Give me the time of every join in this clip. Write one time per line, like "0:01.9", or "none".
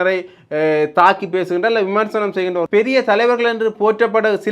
0:02.7